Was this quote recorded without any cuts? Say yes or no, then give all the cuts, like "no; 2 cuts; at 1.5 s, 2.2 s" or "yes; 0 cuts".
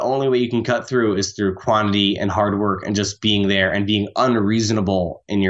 yes; 0 cuts